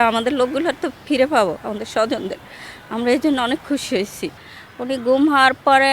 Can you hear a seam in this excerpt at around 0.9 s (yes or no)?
no